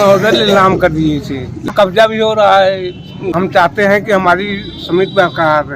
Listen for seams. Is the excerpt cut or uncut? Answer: cut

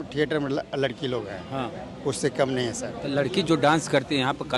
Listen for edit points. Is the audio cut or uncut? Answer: uncut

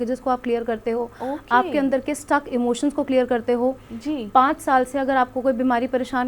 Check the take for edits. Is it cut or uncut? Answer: uncut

